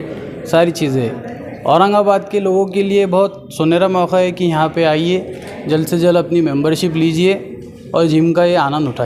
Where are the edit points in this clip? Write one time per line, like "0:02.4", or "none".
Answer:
none